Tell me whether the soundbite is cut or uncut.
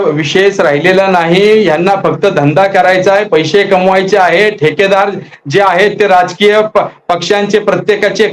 uncut